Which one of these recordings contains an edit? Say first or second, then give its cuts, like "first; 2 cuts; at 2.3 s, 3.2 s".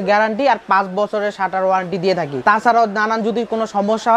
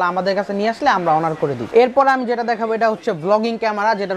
second; 1 cut; at 1.7 s